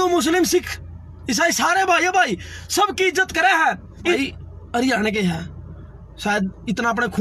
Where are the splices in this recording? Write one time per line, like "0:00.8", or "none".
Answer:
0:04.1